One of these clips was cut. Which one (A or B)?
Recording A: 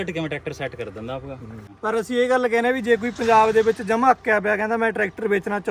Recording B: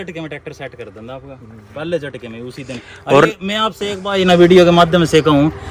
A